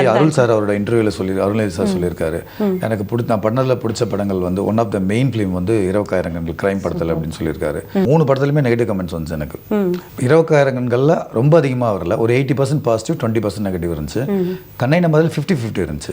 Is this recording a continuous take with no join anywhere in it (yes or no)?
no